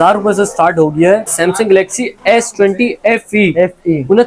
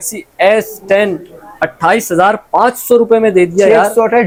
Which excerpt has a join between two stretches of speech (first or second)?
first